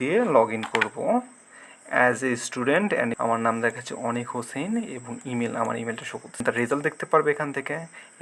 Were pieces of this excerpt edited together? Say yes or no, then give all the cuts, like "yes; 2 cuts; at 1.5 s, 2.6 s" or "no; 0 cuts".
yes; 2 cuts; at 3.2 s, 6.4 s